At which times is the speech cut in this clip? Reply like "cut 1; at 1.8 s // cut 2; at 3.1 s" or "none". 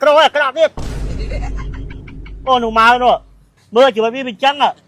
none

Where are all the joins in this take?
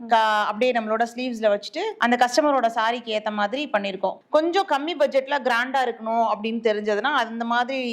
cut 1; at 4.2 s

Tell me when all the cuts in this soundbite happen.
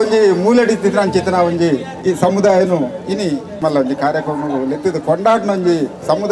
cut 1; at 1.9 s // cut 2; at 3.5 s

